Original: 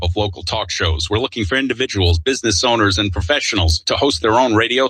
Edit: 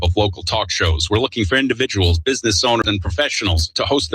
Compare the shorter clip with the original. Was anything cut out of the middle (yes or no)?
yes